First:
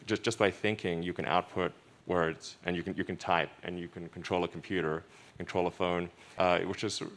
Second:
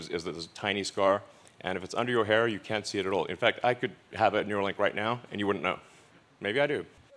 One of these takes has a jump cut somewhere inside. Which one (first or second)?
first